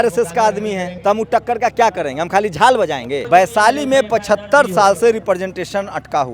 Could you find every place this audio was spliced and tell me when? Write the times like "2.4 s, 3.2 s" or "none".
0.9 s, 3.2 s